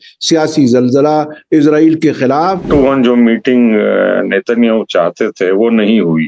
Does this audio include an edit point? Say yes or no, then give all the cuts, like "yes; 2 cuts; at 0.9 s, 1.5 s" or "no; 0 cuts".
yes; 1 cut; at 2.7 s